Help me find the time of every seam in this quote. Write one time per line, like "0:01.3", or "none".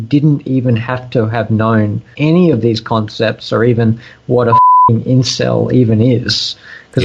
0:02.1